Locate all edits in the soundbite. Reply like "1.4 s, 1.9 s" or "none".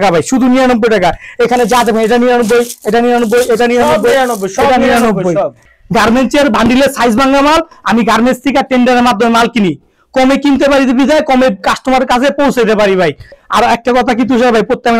5.6 s, 13.4 s

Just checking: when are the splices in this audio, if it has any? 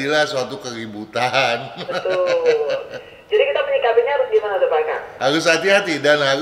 5.0 s

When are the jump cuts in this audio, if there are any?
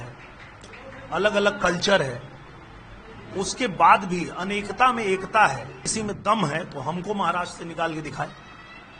5.8 s

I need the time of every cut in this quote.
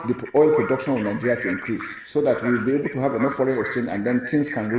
0.9 s

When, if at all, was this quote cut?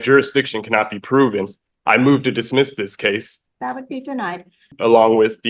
3.3 s, 4.7 s

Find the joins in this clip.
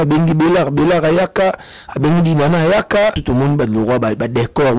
3.2 s

